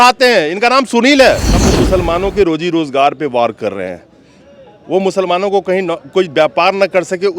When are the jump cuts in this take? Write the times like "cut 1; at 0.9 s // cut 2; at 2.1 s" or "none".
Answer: cut 1; at 1.5 s